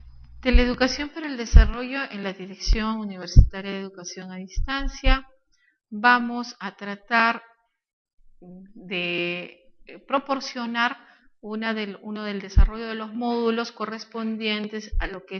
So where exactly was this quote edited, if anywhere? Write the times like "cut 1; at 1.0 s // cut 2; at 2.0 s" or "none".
none